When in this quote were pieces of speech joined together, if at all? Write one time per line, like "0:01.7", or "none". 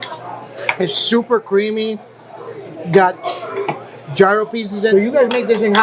0:04.9